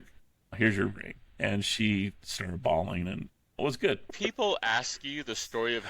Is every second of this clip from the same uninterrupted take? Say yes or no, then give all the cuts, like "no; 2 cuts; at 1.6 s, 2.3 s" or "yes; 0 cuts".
no; 1 cut; at 4.1 s